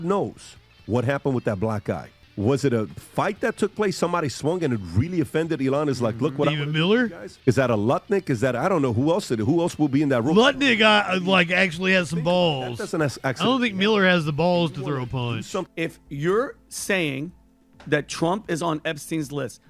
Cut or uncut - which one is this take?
cut